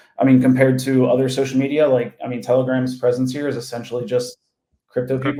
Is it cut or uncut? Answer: uncut